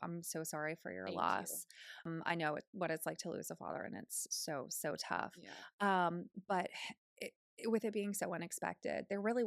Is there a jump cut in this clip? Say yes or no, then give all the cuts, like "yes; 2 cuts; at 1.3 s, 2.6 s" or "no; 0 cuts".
yes; 1 cut; at 2.1 s